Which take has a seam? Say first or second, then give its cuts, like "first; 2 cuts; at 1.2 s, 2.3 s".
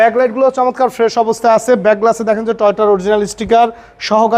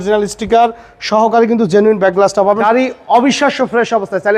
second; 1 cut; at 2.6 s